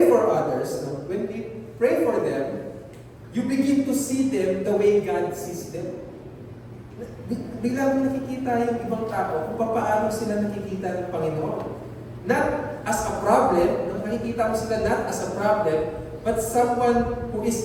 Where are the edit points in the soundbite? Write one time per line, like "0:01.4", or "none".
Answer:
none